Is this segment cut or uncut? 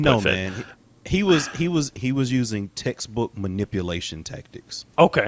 uncut